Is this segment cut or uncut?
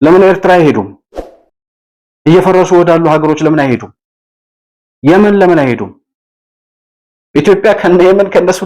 uncut